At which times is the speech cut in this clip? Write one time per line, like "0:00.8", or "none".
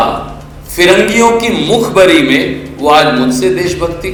none